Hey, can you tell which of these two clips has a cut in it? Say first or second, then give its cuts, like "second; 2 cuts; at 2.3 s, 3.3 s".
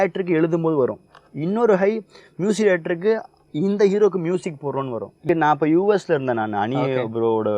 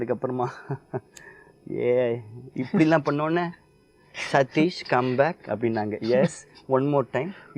first; 1 cut; at 5.2 s